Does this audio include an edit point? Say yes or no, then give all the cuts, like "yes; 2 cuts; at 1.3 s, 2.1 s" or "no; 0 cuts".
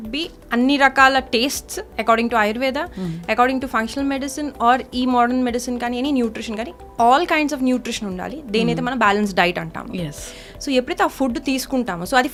no; 0 cuts